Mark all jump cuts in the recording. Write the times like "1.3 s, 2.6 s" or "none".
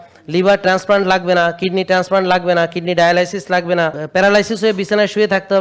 4.0 s